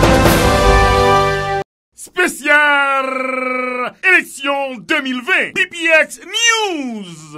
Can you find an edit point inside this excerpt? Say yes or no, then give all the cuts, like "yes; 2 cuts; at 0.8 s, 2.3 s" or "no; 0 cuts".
yes; 1 cut; at 1.4 s